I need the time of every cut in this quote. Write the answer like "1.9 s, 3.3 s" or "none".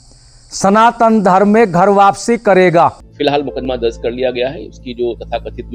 3.1 s